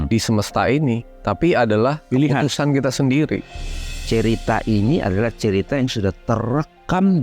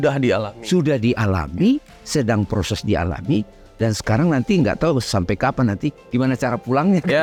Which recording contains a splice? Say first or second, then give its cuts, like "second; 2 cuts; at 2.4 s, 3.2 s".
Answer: first; 1 cut; at 3.7 s